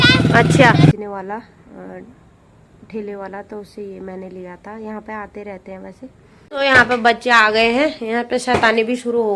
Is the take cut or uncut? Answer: cut